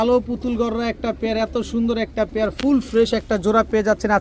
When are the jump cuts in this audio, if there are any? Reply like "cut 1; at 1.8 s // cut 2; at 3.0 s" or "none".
none